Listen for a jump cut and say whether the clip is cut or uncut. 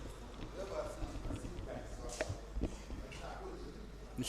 uncut